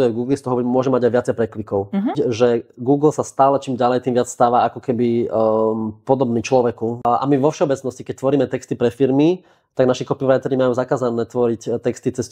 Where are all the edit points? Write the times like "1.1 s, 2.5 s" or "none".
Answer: 2.1 s, 7.0 s